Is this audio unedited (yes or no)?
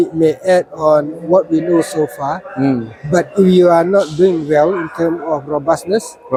yes